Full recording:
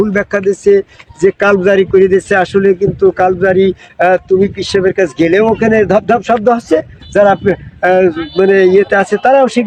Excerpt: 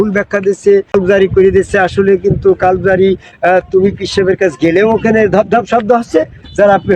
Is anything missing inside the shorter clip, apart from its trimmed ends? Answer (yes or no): yes